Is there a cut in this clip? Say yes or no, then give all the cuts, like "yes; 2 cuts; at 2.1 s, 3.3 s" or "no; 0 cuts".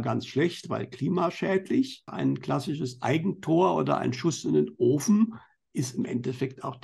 yes; 1 cut; at 2.1 s